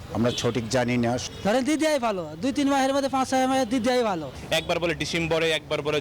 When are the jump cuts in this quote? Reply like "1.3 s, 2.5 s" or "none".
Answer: 1.2 s, 4.4 s